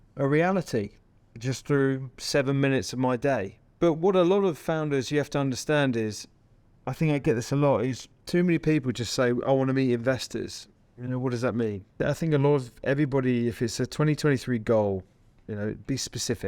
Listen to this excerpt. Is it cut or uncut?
uncut